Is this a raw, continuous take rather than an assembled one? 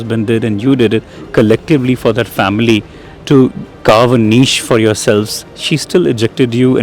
yes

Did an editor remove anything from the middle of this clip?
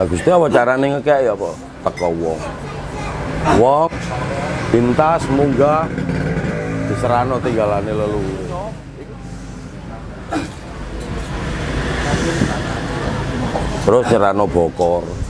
yes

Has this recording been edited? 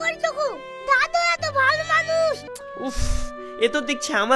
yes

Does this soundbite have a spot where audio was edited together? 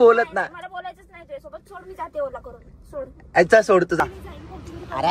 yes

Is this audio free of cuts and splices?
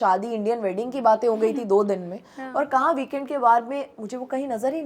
yes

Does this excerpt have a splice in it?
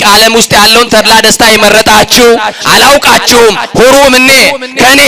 no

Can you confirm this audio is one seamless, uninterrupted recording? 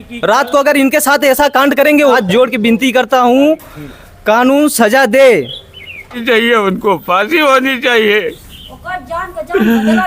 no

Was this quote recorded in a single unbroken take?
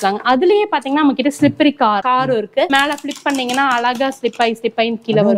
no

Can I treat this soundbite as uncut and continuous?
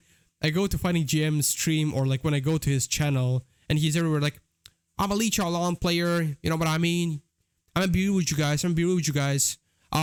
yes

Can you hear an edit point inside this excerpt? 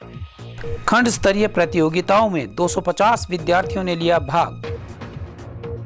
no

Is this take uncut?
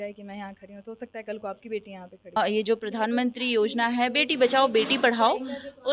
no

